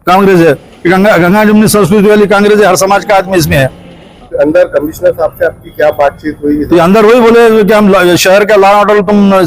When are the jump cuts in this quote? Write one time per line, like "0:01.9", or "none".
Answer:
0:04.2